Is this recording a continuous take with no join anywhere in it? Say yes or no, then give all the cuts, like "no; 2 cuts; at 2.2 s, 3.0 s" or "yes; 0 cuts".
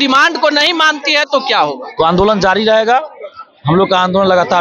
yes; 0 cuts